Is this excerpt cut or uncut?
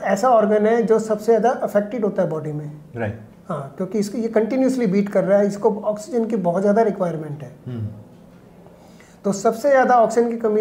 uncut